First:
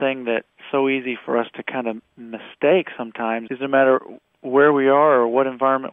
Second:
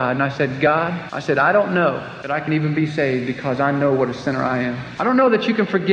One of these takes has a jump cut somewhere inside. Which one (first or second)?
second